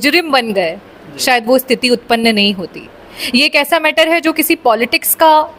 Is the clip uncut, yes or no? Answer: yes